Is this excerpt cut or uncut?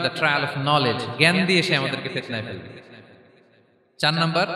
uncut